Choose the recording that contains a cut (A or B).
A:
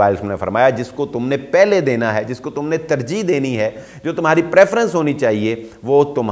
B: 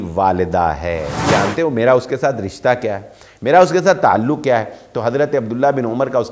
B